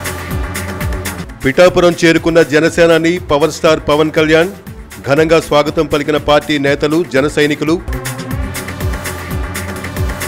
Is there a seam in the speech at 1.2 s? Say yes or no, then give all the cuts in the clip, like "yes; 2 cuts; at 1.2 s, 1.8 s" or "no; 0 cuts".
yes; 1 cut; at 1.2 s